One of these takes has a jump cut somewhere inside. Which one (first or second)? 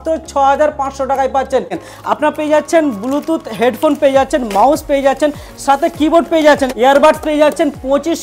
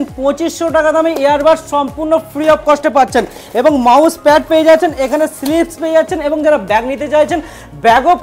first